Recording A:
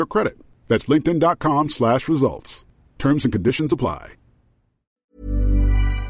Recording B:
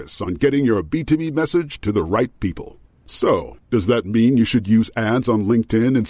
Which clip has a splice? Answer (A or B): A